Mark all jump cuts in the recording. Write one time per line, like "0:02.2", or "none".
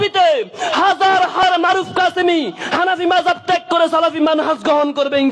0:01.4